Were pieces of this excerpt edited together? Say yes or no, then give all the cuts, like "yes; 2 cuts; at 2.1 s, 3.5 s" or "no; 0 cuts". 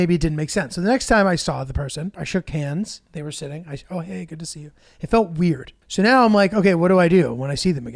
yes; 2 cuts; at 2.2 s, 5.8 s